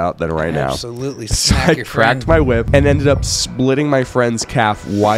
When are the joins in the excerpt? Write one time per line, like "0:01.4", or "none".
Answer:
0:02.7